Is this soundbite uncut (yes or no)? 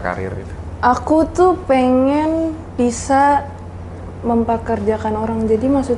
yes